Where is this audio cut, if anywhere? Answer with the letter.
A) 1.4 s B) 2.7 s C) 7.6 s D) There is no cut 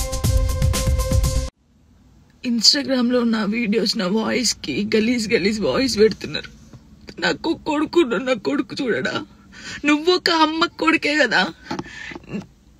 A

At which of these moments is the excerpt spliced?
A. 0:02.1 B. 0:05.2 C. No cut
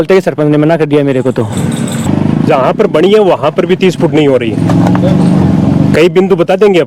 A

